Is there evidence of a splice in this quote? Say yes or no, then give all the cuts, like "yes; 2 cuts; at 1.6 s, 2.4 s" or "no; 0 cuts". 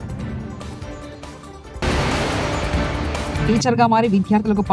yes; 2 cuts; at 1.8 s, 3.4 s